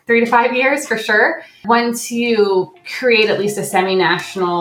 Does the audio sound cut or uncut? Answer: cut